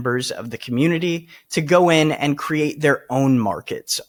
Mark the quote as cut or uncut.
uncut